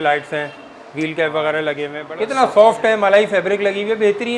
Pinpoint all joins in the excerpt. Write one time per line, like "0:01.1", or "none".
0:02.0